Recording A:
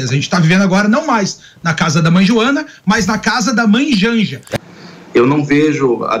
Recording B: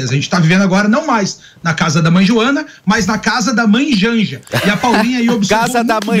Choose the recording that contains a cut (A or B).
A